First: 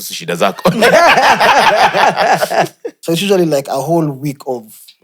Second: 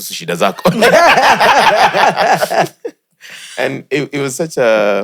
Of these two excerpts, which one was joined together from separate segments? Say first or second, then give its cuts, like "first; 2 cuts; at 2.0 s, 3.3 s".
first; 1 cut; at 2.9 s